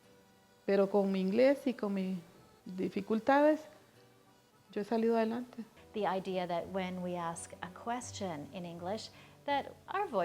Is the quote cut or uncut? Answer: cut